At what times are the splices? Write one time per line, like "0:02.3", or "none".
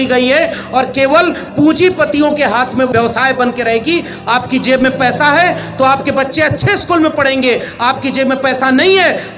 0:02.9